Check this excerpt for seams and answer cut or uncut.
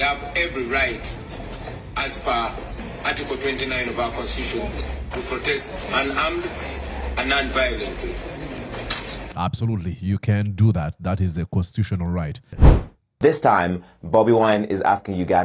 cut